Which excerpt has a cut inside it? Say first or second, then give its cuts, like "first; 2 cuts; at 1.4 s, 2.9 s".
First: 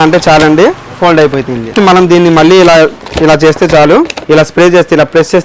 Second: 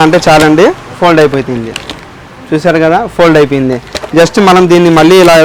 first; 2 cuts; at 1.7 s, 4.2 s